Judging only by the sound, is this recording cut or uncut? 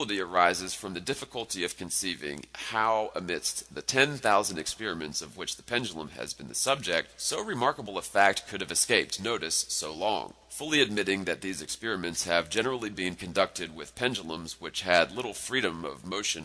cut